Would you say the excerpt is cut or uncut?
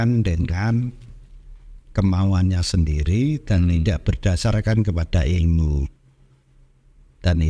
uncut